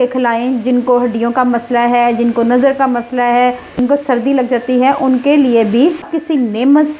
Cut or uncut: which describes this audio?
cut